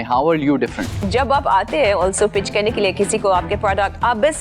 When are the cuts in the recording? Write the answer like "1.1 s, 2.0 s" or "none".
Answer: 1.0 s